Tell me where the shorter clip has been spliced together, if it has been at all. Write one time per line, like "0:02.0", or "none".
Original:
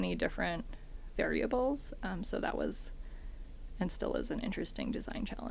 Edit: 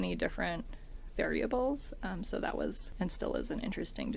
0:02.8